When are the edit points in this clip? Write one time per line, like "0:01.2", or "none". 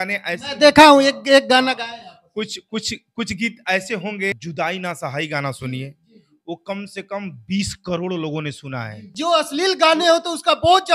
0:04.4
0:09.0

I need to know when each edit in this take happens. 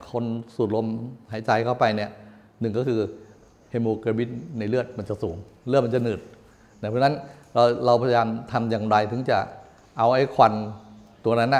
none

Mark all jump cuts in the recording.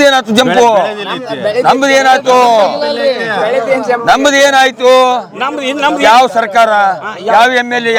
none

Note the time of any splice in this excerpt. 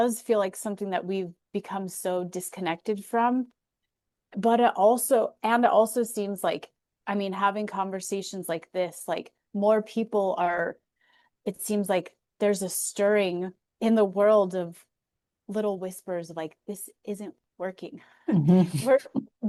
none

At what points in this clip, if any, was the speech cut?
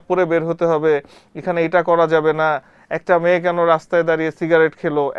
none

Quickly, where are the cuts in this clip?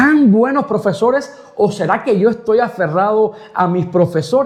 none

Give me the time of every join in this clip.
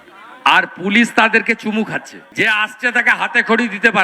0:02.2

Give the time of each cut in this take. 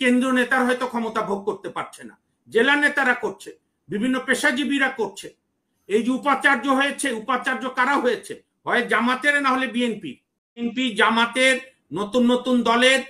0:10.7

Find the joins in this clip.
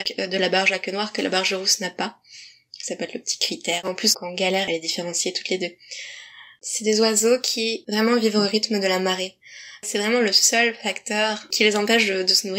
0:03.9
0:06.6
0:09.8

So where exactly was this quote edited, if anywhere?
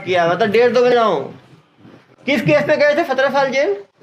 0:00.9

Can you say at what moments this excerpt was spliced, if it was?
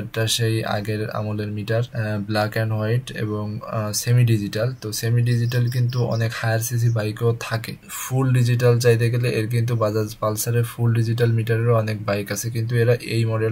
none

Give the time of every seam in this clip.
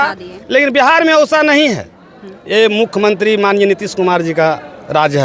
none

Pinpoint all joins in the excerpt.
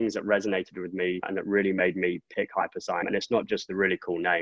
0:01.3
0:03.0

